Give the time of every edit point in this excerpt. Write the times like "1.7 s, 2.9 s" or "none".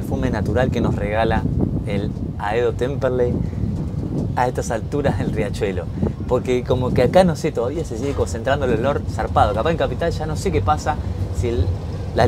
none